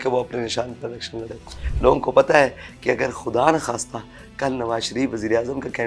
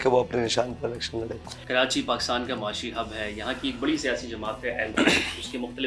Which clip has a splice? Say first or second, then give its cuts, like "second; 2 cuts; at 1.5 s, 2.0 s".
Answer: first; 1 cut; at 1.6 s